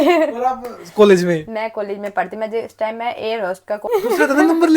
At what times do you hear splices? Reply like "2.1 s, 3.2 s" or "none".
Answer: 3.9 s